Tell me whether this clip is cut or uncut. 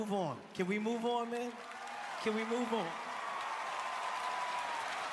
uncut